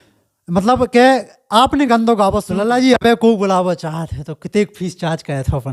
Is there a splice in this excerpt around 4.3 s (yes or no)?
no